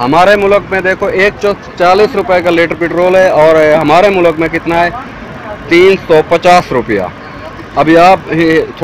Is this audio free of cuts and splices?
yes; 0 cuts

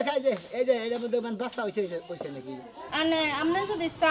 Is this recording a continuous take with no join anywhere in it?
no; 1 cut; at 2.7 s

